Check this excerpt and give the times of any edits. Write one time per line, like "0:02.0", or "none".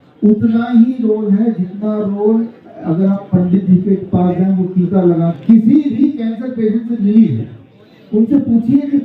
0:05.3